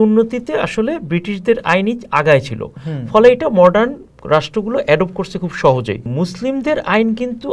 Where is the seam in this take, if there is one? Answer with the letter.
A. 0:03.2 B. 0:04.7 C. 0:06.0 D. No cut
C